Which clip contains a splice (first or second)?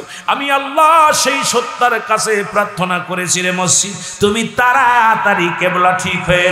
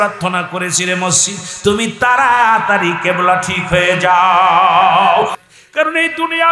second